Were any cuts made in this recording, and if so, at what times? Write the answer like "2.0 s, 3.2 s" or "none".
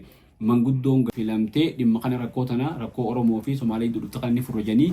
1.1 s

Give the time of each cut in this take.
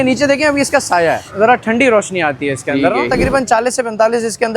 1.3 s, 3.1 s

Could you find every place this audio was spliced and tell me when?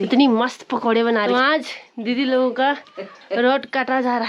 1.3 s

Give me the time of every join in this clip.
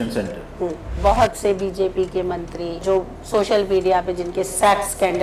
0.9 s, 2.8 s

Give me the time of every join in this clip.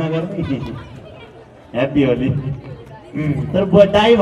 none

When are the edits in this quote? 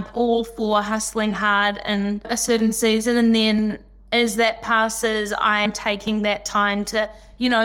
5.7 s

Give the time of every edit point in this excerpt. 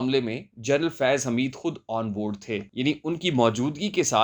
2.7 s

